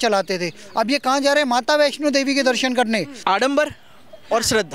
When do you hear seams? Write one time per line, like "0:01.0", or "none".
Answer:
0:03.1